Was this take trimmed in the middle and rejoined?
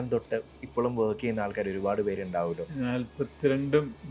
yes; 1 cut; at 2.7 s

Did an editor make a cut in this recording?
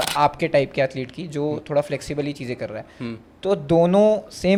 no; 0 cuts

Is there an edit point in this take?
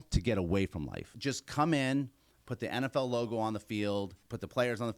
yes; 1 cut; at 1.0 s

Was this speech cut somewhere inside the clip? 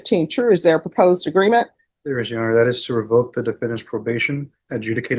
no; 0 cuts

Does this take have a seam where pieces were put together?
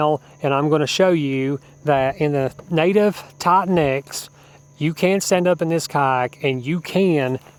no; 0 cuts

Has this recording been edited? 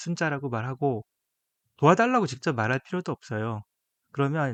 no; 0 cuts

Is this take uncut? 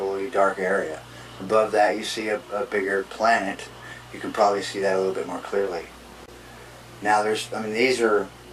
yes; 0 cuts

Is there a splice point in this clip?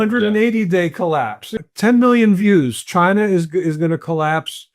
yes; 1 cut; at 1.4 s

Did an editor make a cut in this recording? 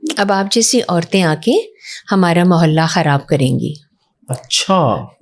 no; 0 cuts

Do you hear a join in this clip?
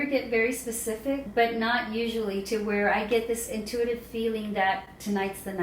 yes; 1 cut; at 1.3 s

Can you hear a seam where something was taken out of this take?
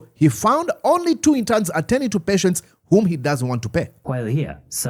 no; 0 cuts

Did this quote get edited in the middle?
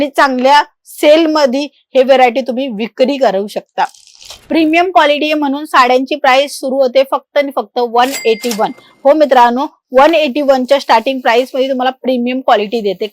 yes; 1 cut; at 4.4 s

